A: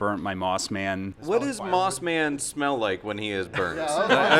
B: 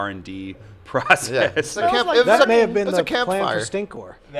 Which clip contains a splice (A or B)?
A